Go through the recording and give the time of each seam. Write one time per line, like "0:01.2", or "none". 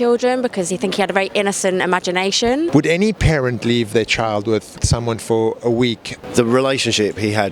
0:02.7
0:04.8
0:06.2